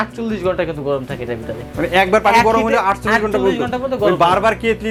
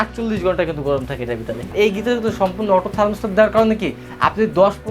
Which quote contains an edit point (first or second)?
second